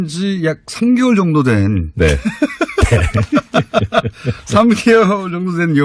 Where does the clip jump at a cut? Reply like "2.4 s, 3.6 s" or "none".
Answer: 2.9 s